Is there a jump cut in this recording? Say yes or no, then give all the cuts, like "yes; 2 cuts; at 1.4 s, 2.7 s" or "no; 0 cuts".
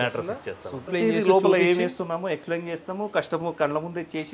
yes; 1 cut; at 0.9 s